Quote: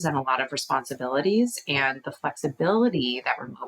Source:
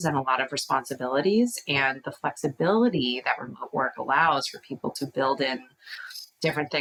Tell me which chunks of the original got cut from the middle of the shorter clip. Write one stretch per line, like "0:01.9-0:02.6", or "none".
none